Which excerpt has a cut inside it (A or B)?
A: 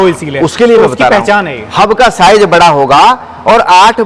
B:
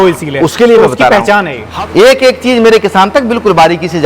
B